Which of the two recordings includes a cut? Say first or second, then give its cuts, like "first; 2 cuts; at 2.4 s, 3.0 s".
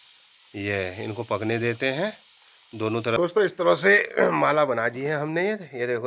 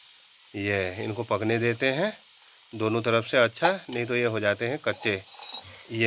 first; 1 cut; at 3.3 s